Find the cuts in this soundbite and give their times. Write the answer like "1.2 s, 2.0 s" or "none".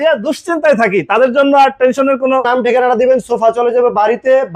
2.5 s